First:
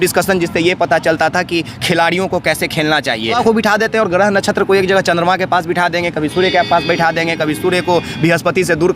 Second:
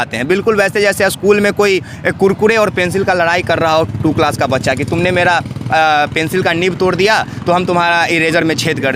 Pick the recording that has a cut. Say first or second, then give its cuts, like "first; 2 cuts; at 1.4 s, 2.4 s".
first; 1 cut; at 3.4 s